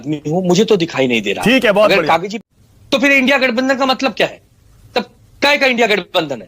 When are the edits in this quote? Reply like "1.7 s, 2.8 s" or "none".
2.3 s